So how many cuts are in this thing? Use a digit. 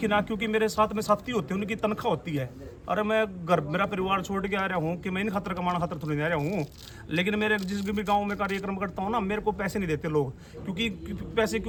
0